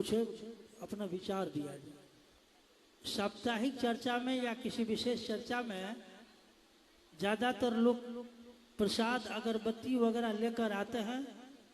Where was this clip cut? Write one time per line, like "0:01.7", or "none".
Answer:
0:02.4